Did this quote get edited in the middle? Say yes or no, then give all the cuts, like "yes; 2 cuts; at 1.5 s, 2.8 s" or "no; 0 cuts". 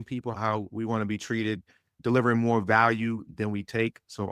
no; 0 cuts